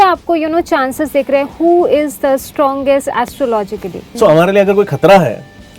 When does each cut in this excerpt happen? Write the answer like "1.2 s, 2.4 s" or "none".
4.0 s